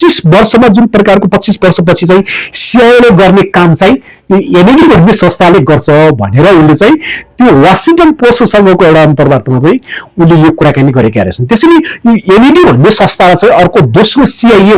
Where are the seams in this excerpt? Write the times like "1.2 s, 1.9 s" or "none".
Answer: none

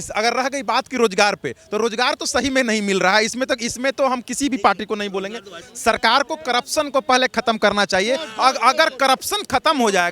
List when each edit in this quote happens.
5.6 s

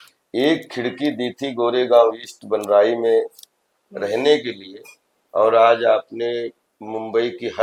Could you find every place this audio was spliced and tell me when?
none

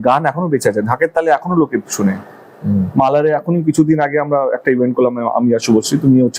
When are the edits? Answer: none

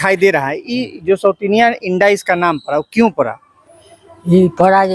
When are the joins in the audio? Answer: none

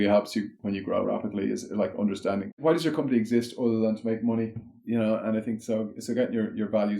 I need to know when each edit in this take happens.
0.8 s, 2.6 s, 4.8 s

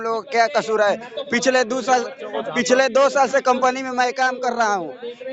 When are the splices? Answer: none

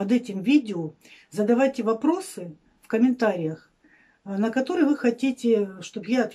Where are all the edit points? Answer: none

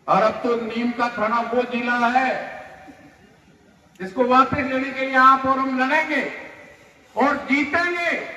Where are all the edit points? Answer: none

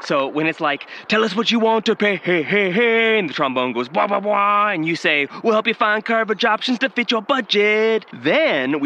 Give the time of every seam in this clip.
none

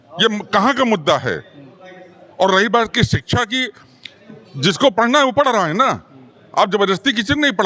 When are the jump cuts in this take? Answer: none

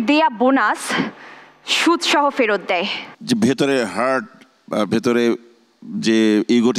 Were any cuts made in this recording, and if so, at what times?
3.1 s

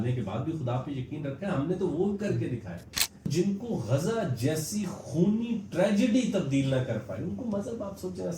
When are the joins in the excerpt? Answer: 3.3 s

